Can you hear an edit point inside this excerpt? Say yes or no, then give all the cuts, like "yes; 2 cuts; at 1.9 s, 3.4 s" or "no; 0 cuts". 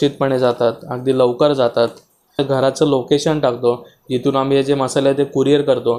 yes; 1 cut; at 2.4 s